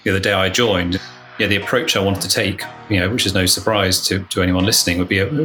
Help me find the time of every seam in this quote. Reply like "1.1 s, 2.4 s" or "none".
1.0 s